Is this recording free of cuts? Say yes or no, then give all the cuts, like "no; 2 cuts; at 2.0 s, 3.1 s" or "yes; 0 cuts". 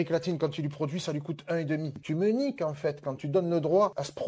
no; 1 cut; at 2.0 s